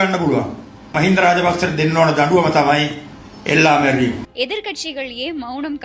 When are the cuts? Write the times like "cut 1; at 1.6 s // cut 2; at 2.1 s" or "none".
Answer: cut 1; at 4.3 s